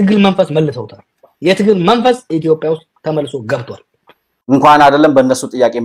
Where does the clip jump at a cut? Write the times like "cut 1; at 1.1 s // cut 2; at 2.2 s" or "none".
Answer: cut 1; at 4.6 s